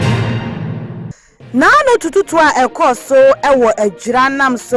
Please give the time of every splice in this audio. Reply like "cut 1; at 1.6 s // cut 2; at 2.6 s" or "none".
cut 1; at 0.9 s